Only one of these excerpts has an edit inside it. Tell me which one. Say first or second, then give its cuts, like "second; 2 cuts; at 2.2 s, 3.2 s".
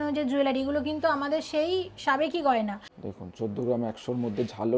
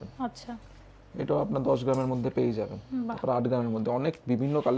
first; 1 cut; at 2.8 s